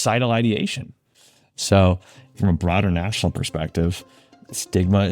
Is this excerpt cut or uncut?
cut